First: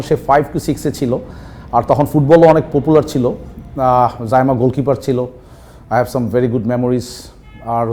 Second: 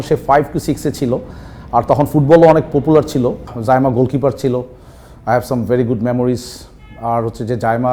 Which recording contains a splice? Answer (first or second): second